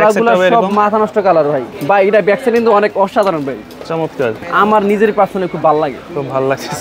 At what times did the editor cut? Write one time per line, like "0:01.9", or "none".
0:01.7
0:04.4